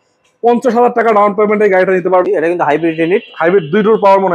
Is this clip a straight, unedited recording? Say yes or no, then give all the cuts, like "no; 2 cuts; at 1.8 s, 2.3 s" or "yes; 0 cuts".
no; 1 cut; at 2.2 s